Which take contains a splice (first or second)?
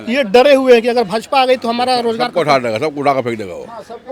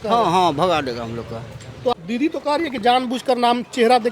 second